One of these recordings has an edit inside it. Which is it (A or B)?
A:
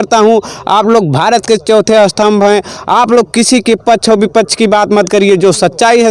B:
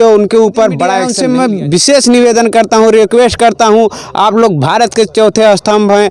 B